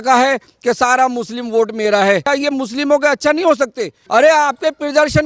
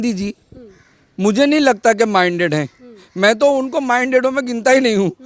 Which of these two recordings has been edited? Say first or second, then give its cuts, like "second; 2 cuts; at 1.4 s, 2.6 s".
first; 2 cuts; at 2.3 s, 4.0 s